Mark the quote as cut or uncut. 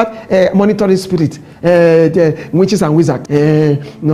cut